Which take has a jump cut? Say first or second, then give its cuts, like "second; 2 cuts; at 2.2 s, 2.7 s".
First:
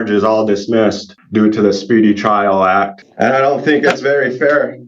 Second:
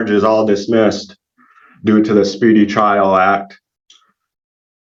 first; 2 cuts; at 1.1 s, 3.0 s